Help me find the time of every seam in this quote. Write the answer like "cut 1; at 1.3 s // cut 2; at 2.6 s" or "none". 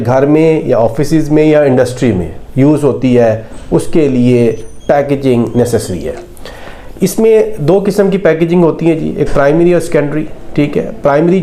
none